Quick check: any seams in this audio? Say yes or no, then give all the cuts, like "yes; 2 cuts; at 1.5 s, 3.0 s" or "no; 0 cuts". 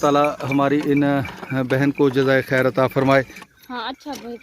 yes; 1 cut; at 3.5 s